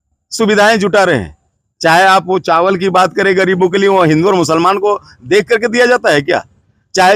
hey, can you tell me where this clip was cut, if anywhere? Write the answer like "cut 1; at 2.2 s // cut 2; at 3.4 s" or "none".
none